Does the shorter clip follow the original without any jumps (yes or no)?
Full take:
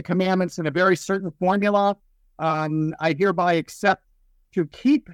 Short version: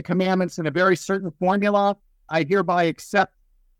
no